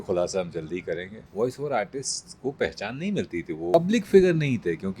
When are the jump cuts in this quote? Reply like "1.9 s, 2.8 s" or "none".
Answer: 1.2 s, 3.7 s